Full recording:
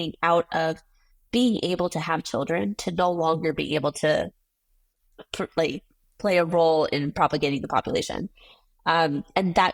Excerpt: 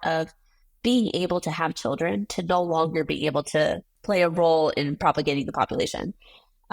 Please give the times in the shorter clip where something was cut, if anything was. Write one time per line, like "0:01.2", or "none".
0:03.9